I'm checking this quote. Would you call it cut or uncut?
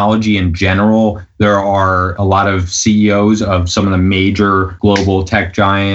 cut